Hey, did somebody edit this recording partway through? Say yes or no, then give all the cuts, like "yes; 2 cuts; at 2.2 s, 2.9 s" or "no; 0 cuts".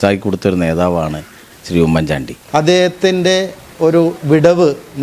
yes; 1 cut; at 2.3 s